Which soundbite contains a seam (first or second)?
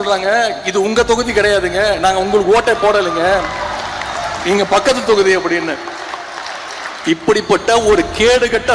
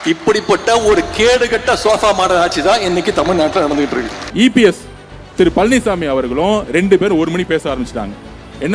second